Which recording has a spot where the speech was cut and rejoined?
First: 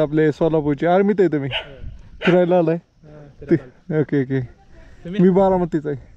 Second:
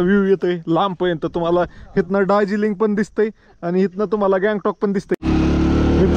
second; 1 cut; at 5.2 s

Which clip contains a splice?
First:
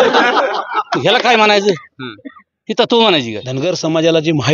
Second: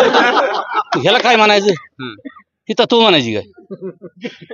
first; 1 cut; at 3.5 s

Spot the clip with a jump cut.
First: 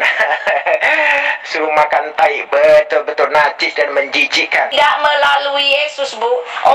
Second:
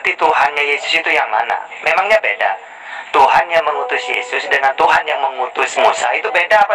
first; 1 cut; at 4.7 s

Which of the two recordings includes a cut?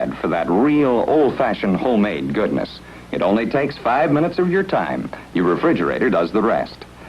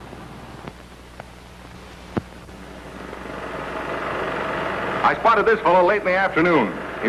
first; 1 cut; at 1.4 s

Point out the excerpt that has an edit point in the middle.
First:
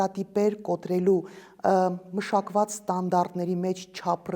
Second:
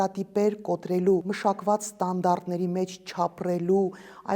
second; 1 cut; at 1.3 s

